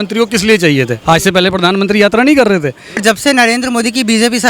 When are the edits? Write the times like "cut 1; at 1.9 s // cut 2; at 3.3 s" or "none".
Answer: cut 1; at 3.0 s